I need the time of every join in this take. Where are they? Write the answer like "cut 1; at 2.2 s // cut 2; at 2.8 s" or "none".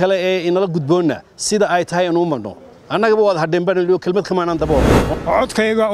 cut 1; at 5.0 s